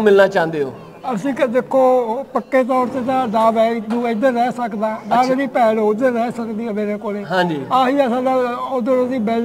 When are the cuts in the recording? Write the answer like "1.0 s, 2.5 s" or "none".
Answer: none